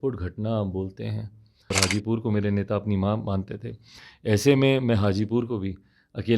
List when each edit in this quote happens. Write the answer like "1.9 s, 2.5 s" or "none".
1.7 s